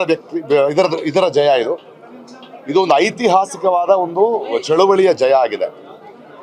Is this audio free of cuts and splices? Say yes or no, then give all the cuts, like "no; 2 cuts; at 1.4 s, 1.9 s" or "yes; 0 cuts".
yes; 0 cuts